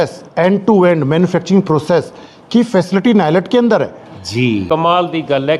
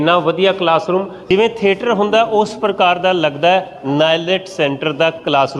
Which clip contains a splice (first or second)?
first